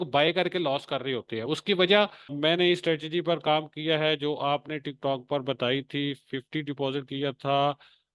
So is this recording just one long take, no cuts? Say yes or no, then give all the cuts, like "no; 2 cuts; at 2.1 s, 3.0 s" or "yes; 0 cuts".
no; 1 cut; at 2.3 s